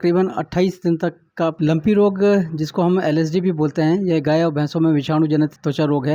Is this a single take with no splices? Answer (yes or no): no